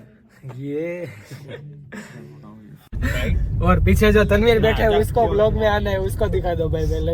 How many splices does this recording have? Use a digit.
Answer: 1